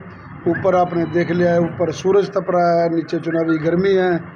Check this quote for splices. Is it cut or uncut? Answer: uncut